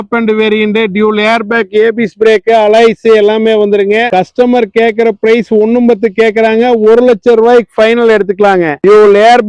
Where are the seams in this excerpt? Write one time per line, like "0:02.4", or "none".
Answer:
0:04.1

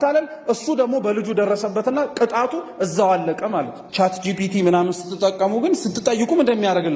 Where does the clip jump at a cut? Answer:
0:03.8

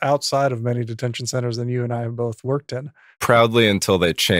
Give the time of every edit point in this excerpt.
none

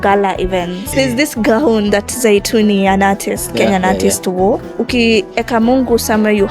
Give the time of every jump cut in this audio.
0:00.9
0:04.7

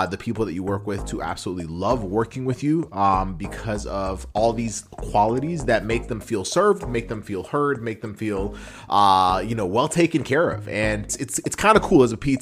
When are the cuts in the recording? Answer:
0:11.2

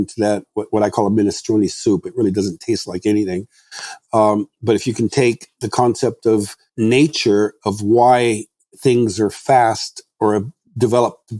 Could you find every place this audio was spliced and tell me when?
0:06.6

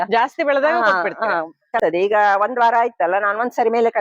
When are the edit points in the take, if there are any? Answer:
0:01.8

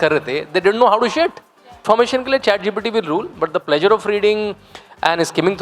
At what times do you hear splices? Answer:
0:01.8

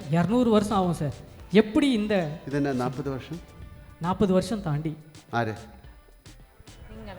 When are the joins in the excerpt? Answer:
none

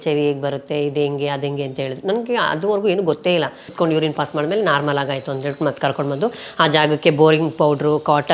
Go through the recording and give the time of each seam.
0:03.6

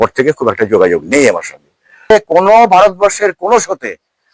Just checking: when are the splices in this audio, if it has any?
0:02.1

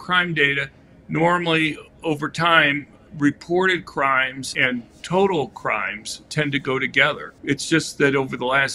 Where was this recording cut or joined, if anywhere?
0:04.5
0:07.3

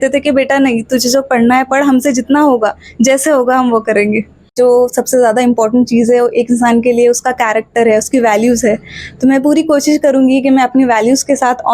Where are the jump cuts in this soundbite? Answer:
0:04.5

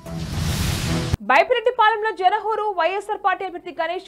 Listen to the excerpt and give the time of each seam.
0:01.1

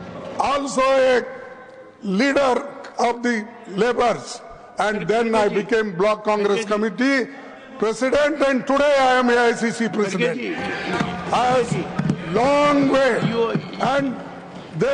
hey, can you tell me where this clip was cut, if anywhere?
none

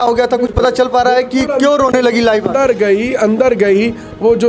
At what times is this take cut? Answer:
none

